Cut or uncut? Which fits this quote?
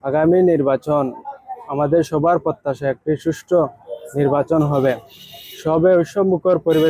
uncut